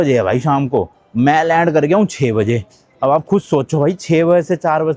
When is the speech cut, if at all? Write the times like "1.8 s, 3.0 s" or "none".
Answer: none